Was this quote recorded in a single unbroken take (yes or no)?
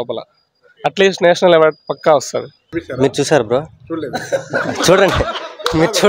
no